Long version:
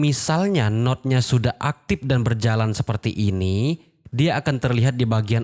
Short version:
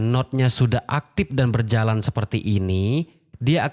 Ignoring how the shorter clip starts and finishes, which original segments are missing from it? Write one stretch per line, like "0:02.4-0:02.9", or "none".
none